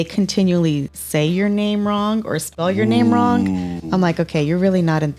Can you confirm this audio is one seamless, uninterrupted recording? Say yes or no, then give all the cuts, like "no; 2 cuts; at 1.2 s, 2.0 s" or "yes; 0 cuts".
no; 1 cut; at 1.0 s